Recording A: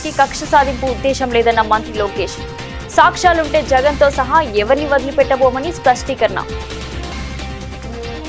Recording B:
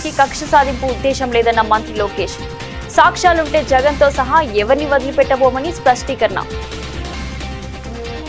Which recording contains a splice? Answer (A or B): A